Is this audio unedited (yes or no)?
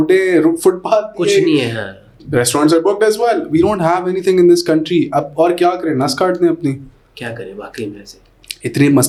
yes